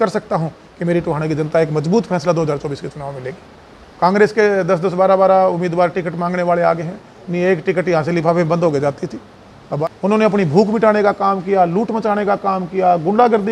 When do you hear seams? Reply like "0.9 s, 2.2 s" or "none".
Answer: 3.9 s, 9.8 s